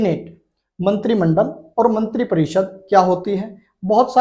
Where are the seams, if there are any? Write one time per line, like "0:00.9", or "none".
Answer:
none

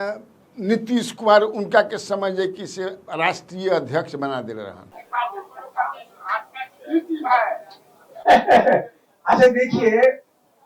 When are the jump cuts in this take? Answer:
0:05.0

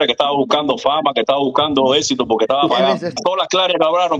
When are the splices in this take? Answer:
0:03.2

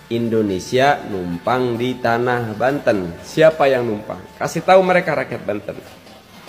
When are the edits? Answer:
0:03.2

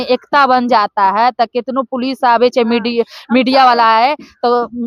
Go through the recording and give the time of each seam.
none

